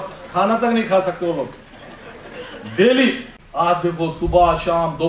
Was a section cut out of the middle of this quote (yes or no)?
yes